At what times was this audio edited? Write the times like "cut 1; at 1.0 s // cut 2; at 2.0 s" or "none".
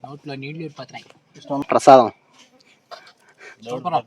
cut 1; at 1.6 s